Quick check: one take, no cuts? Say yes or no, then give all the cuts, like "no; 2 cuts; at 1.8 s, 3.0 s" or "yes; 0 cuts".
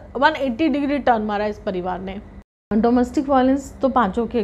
no; 1 cut; at 2.7 s